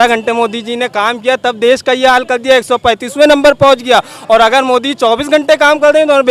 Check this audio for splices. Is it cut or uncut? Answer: uncut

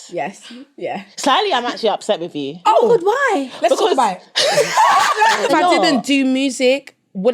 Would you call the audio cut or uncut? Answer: cut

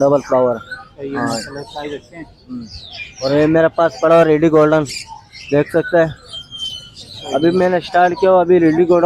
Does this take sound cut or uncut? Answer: uncut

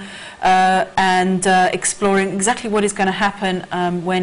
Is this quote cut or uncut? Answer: uncut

